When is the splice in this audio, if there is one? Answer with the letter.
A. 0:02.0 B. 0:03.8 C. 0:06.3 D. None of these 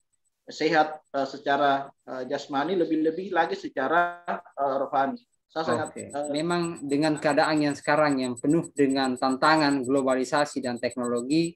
C